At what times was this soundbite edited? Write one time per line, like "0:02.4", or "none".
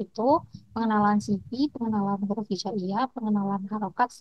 none